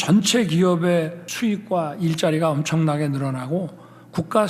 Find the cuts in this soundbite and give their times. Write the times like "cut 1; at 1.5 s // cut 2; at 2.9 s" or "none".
cut 1; at 1.2 s